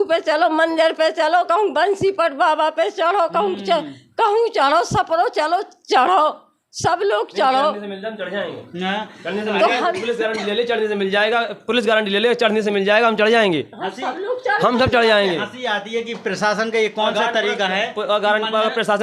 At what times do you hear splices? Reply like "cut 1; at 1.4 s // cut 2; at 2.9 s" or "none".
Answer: none